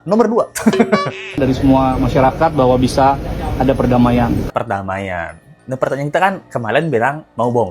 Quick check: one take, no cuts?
no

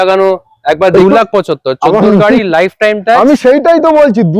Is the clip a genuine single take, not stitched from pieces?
no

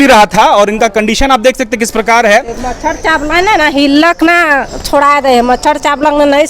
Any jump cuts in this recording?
no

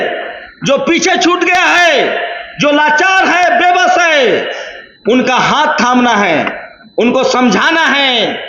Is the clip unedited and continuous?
yes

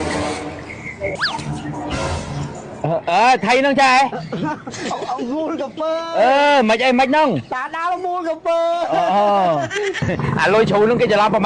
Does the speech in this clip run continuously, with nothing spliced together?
no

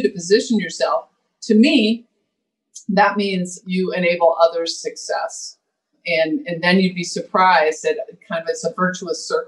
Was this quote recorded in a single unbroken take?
no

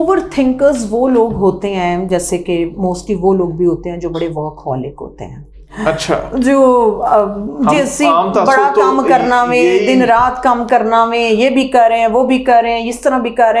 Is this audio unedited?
yes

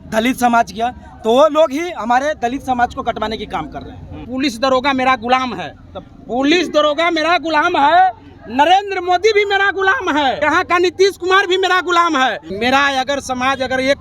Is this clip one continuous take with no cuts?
no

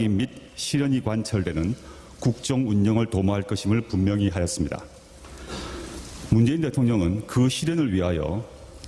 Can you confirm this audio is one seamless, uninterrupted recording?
yes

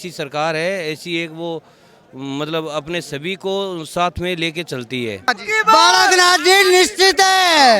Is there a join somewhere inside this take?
yes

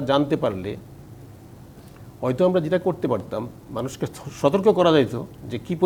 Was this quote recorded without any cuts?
yes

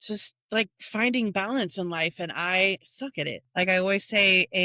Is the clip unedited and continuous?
no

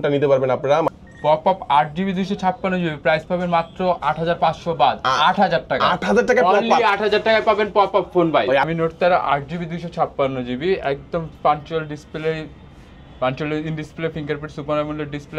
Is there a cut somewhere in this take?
yes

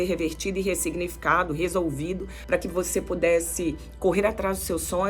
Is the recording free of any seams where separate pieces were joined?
no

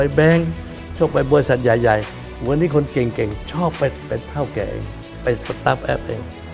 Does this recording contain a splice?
yes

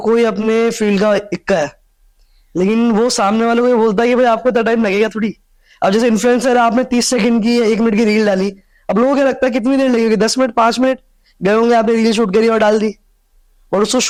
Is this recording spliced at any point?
no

